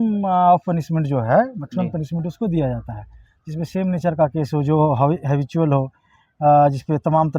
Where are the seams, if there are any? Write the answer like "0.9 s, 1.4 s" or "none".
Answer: none